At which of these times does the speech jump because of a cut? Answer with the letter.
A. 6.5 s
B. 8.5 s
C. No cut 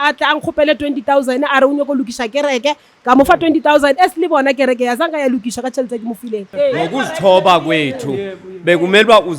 A